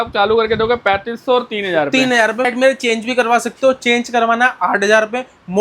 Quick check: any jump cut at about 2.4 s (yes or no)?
yes